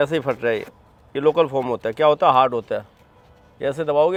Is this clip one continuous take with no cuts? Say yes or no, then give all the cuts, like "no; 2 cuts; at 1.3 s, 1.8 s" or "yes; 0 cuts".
yes; 0 cuts